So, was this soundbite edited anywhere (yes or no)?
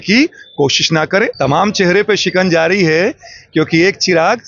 yes